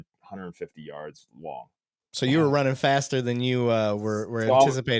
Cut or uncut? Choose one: uncut